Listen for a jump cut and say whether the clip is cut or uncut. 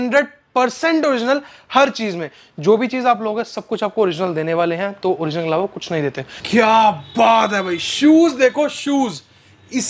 cut